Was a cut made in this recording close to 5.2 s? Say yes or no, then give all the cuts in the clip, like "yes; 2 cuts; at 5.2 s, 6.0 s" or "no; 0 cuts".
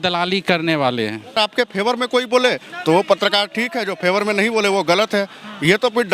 no; 1 cut; at 1.4 s